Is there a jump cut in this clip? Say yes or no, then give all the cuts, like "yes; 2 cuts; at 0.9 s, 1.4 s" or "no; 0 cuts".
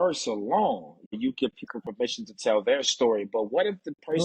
yes; 1 cut; at 1.1 s